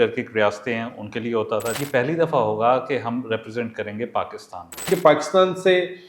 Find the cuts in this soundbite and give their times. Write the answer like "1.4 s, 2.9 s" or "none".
1.8 s, 4.9 s

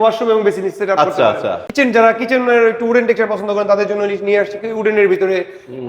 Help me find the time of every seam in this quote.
1.7 s

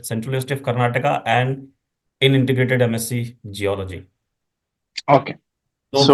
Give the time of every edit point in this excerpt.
none

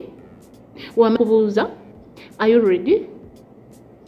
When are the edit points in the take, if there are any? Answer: 1.2 s

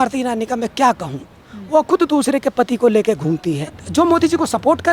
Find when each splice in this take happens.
3.8 s

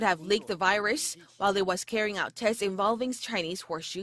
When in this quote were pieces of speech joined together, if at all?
none

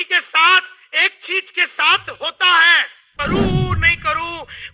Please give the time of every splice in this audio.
3.1 s

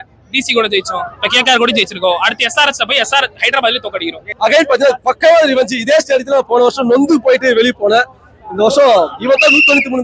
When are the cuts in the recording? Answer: 4.2 s

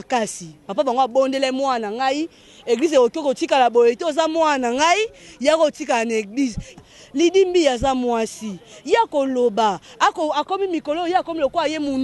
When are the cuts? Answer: 6.7 s

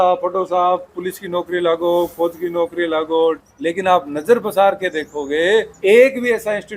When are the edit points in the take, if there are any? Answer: 3.5 s, 5.7 s

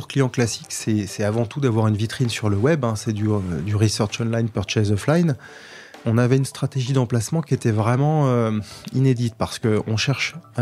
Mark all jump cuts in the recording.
6.0 s

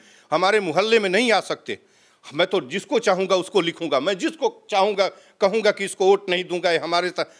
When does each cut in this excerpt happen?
none

